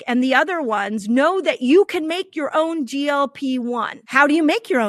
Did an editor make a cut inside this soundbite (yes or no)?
yes